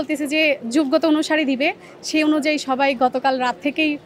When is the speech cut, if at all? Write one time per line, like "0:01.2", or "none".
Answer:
none